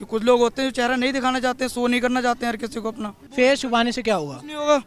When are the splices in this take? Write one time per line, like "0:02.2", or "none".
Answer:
0:03.2